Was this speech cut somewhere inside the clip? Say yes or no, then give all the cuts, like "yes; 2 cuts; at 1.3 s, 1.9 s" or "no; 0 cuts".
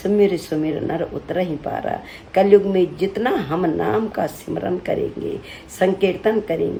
no; 0 cuts